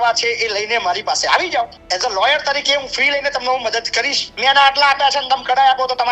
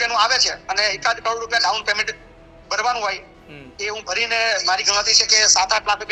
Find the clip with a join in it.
first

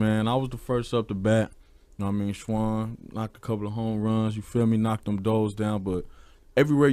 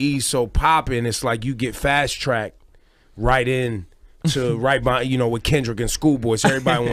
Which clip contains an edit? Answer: first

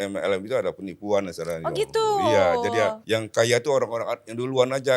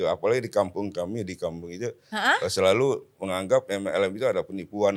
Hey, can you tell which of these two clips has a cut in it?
first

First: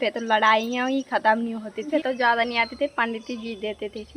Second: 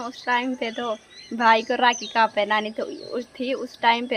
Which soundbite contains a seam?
first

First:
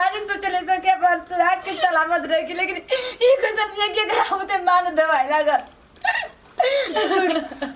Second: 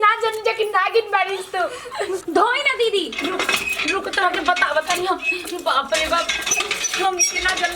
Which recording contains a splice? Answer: second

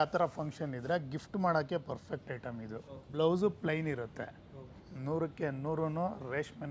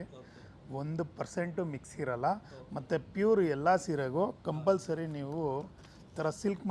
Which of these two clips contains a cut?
first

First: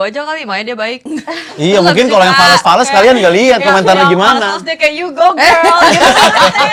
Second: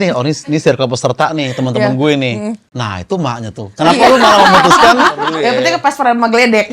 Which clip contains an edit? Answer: second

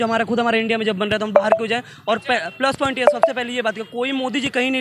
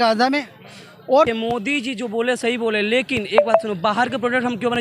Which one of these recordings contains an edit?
second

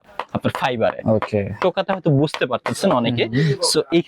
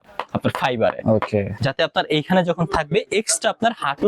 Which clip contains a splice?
second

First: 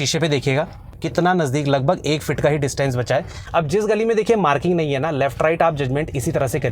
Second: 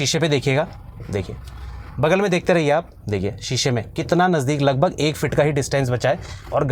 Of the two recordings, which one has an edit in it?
first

